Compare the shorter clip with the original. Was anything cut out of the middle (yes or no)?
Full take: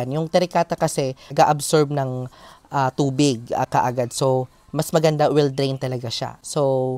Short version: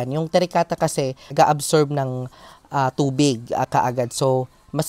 no